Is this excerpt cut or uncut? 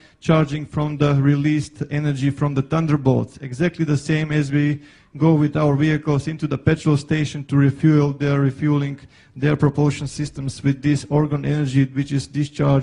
uncut